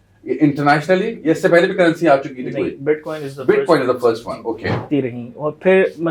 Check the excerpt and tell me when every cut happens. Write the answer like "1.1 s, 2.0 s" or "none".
4.9 s